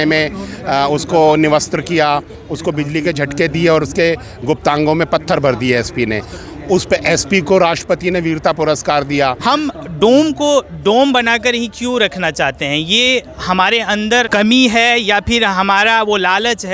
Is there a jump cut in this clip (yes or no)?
yes